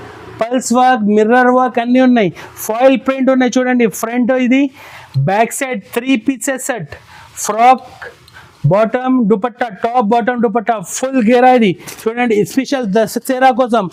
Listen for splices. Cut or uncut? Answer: uncut